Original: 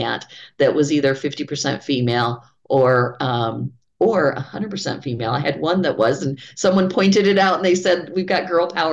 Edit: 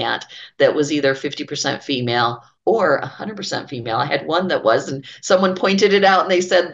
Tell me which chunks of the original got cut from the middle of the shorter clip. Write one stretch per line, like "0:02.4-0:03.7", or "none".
0:02.5-0:03.8